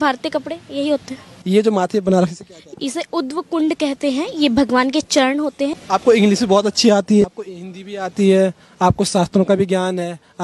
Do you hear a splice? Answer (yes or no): yes